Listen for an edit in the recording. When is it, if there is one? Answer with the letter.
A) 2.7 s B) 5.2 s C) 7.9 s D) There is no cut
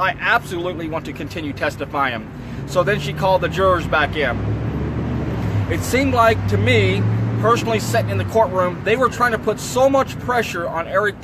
D